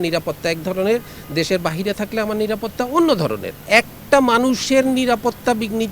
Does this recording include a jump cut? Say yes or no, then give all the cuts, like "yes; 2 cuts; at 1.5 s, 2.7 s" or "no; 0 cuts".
yes; 1 cut; at 3.6 s